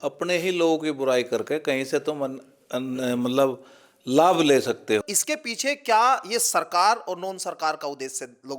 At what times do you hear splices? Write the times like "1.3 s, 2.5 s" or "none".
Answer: 5.0 s